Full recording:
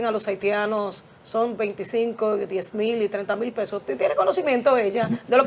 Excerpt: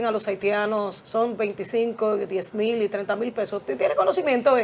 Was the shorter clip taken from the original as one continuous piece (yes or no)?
no